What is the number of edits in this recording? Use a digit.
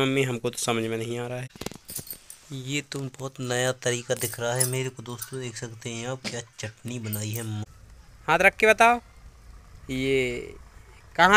2